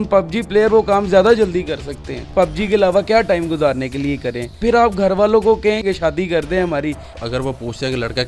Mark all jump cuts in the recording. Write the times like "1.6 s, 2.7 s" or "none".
2.2 s, 4.5 s, 5.8 s, 7.1 s